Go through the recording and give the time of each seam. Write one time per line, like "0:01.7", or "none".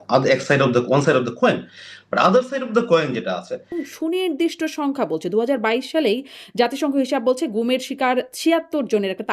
0:03.8